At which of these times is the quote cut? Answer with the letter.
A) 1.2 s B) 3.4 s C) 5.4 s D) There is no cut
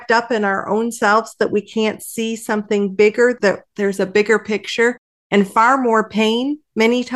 B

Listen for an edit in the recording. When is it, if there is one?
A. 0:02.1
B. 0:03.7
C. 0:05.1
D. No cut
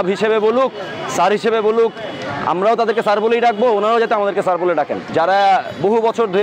C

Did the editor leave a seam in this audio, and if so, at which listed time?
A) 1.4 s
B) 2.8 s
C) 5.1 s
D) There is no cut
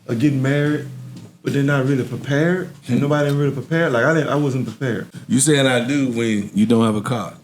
C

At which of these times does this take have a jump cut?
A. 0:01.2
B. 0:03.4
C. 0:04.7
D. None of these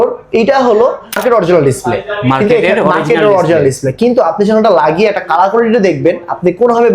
A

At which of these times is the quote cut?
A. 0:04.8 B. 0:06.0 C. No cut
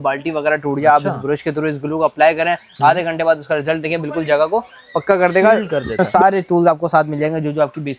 B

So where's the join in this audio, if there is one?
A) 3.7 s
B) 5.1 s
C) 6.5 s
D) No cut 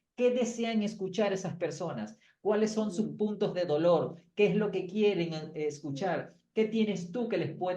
D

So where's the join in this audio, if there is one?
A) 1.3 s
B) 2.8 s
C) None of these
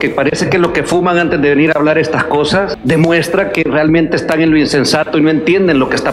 B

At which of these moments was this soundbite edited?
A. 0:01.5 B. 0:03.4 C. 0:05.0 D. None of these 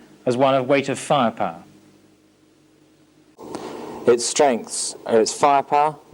B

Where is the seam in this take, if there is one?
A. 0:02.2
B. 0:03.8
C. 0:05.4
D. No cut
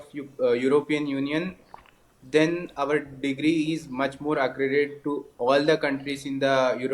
D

